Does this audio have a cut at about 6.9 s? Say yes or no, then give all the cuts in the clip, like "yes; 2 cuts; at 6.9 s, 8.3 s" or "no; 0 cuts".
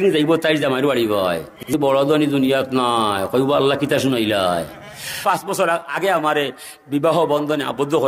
no; 2 cuts; at 1.7 s, 5.1 s